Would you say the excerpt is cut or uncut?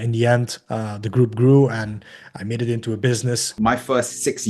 cut